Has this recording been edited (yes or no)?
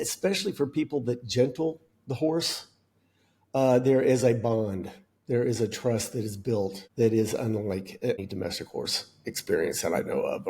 yes